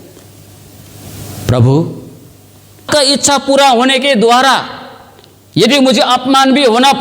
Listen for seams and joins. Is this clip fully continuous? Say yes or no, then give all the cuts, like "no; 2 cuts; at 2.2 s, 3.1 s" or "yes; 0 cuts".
no; 1 cut; at 2.8 s